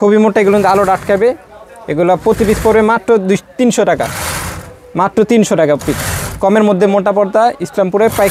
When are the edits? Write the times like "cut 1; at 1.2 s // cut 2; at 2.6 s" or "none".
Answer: none